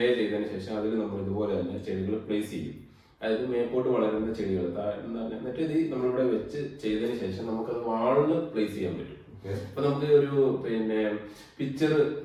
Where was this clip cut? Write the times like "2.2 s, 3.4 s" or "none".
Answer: none

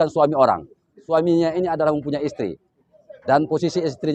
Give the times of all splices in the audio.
1.0 s

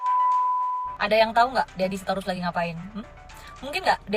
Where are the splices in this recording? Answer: 0.9 s

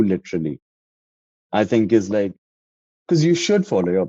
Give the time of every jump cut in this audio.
2.6 s

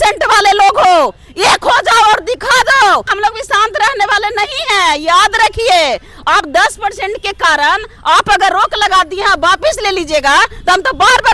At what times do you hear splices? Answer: 3.1 s

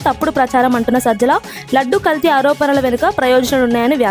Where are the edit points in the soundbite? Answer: none

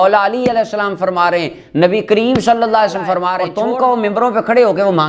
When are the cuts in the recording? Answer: 3.4 s

